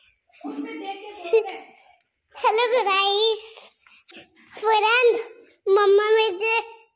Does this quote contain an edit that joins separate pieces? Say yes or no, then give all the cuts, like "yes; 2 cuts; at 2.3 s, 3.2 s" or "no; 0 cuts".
yes; 1 cut; at 4.0 s